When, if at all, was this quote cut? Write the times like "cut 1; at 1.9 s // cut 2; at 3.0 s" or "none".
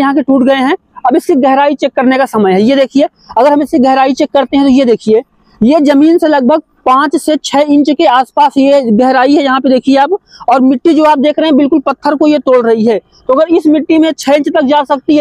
none